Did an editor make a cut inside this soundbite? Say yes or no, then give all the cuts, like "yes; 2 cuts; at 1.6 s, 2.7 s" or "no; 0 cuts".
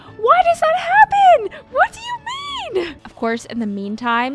yes; 1 cut; at 3.0 s